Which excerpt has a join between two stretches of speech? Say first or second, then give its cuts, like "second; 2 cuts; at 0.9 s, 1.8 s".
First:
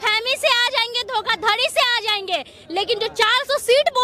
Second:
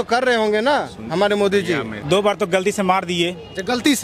second; 1 cut; at 1.9 s